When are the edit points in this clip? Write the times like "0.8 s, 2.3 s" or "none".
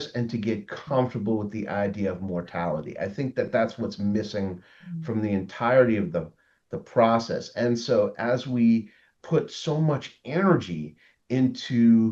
none